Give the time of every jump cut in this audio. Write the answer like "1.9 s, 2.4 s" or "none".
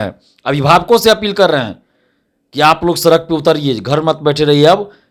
none